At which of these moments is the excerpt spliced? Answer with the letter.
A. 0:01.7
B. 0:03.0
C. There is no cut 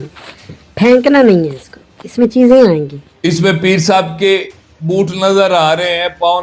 B